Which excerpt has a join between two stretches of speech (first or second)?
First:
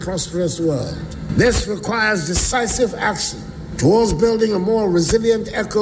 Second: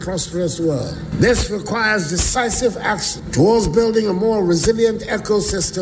second